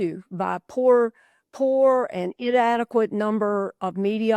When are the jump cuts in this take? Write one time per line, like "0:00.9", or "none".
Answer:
none